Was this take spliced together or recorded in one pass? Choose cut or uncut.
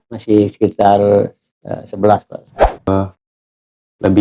cut